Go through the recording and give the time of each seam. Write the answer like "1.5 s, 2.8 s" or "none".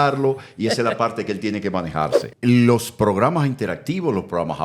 2.2 s